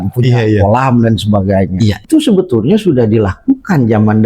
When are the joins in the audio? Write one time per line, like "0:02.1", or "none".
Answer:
0:02.0